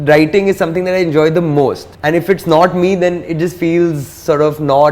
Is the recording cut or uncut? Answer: cut